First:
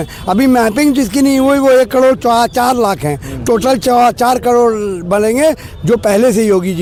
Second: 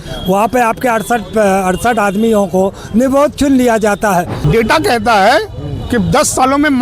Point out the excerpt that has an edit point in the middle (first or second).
second